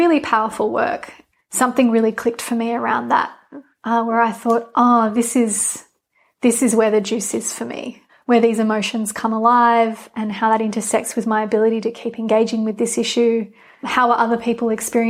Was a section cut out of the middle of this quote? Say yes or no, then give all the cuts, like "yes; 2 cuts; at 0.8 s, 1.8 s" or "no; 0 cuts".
no; 0 cuts